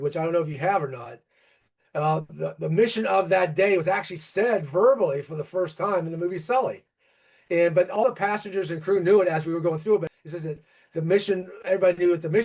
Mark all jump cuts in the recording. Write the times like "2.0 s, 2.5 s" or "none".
10.1 s